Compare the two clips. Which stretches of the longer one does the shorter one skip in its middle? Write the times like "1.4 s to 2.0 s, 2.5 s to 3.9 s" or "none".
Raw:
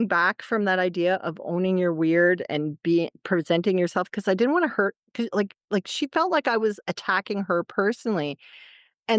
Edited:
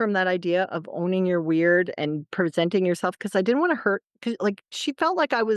2.8 s to 3.2 s, 5.7 s to 5.9 s